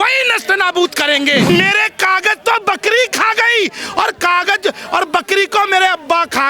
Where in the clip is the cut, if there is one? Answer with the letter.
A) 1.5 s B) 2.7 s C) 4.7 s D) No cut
A